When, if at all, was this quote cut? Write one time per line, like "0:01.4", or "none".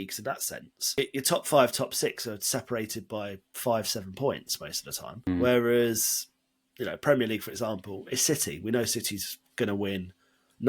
0:01.0
0:05.3